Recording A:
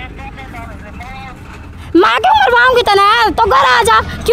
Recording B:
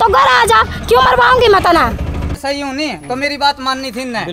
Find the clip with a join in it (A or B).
B